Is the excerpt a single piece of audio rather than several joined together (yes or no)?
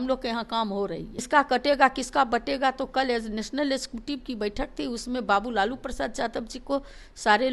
no